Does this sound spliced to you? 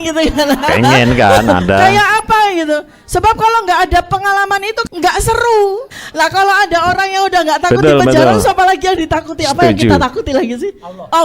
yes; 1 cut; at 4.8 s

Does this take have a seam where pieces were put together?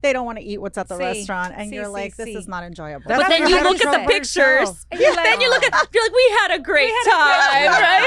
no; 0 cuts

